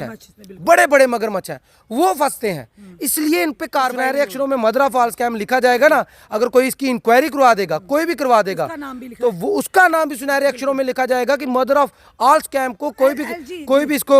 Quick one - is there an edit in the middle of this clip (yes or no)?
yes